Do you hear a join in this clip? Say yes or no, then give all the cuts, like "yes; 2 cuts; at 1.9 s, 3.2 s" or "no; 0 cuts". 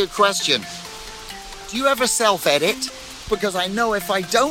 yes; 1 cut; at 3.2 s